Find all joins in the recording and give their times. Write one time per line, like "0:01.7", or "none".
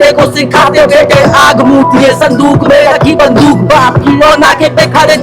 none